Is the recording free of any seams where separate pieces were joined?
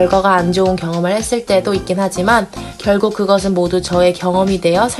yes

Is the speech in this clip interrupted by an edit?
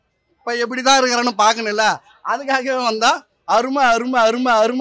no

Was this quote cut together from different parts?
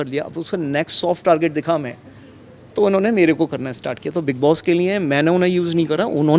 no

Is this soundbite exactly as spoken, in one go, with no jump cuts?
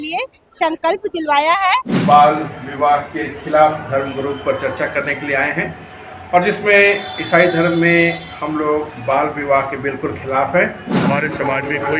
no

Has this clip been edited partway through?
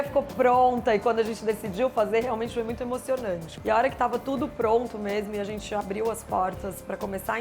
yes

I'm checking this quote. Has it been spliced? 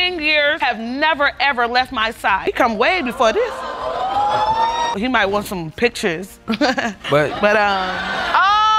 no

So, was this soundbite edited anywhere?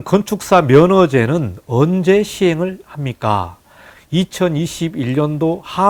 no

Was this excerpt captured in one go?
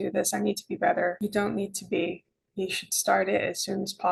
yes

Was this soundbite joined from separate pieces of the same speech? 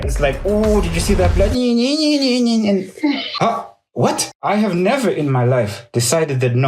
yes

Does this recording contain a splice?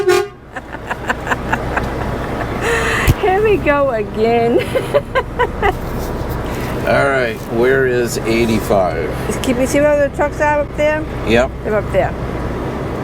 no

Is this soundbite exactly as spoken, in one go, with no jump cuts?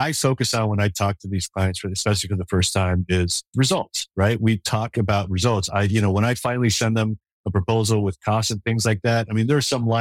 no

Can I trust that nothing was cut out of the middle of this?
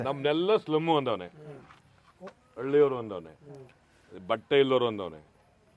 yes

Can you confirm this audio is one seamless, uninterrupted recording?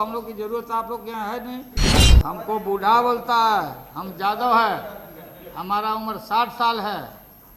no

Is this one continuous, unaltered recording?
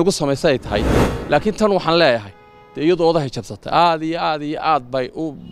no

